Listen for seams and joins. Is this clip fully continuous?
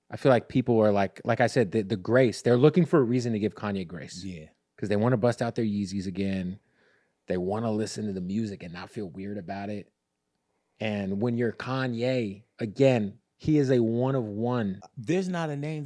no; 1 cut; at 14.9 s

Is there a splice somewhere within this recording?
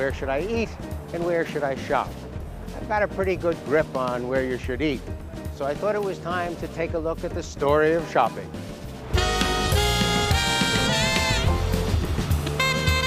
no; 0 cuts

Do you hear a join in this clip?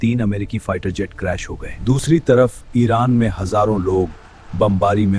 yes; 1 cut; at 2.0 s

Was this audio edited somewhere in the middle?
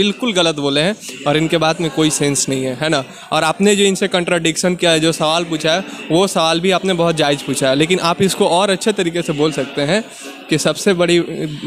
no; 0 cuts

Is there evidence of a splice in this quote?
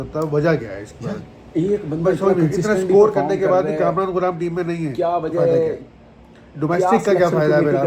no; 0 cuts

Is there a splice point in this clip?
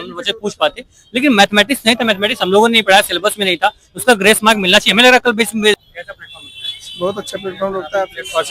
no; 0 cuts

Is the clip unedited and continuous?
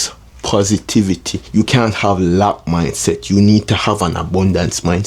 no; 1 cut; at 1.4 s

